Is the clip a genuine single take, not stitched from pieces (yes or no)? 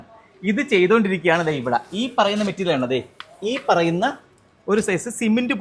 yes